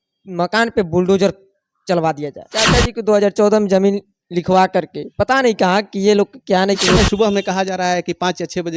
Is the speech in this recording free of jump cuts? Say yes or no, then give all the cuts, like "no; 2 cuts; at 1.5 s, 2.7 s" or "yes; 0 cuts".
no; 2 cuts; at 2.5 s, 7.0 s